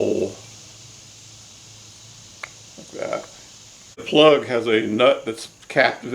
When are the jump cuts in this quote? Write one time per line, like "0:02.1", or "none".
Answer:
0:04.0